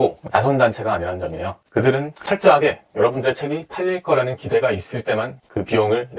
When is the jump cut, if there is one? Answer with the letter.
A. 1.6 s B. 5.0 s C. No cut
A